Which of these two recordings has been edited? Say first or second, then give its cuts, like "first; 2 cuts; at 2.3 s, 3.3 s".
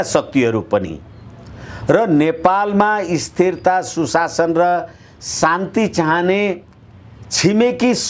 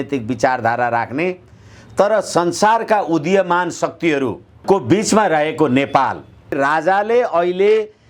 second; 2 cuts; at 4.5 s, 6.6 s